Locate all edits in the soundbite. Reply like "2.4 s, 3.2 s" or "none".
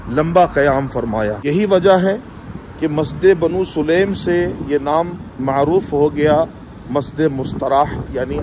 1.4 s